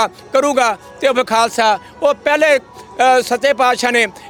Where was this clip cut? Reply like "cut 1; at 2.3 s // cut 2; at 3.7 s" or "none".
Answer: none